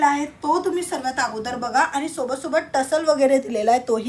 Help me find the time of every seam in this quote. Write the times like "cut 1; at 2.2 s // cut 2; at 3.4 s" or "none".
none